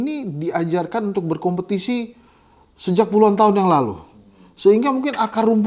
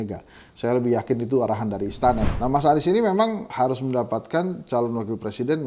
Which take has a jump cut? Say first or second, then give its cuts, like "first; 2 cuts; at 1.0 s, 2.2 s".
second; 2 cuts; at 2.3 s, 3.5 s